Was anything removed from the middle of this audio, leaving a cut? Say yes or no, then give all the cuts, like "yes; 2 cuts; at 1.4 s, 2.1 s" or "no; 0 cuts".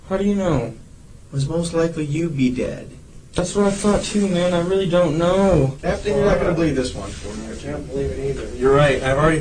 yes; 1 cut; at 5.8 s